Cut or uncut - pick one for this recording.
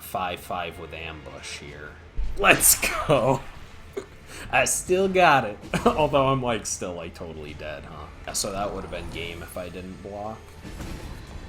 cut